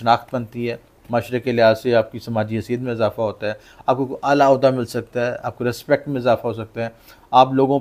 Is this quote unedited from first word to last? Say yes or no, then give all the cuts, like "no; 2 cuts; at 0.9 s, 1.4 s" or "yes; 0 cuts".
yes; 0 cuts